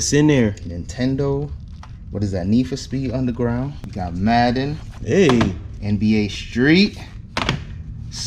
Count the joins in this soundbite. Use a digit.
1